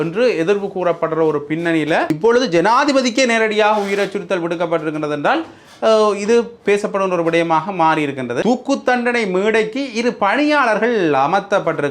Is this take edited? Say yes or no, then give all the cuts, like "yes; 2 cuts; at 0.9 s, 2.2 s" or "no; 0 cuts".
yes; 2 cuts; at 2.1 s, 8.4 s